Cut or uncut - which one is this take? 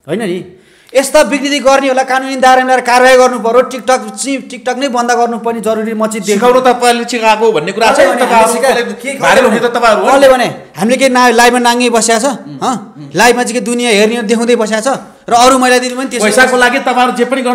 uncut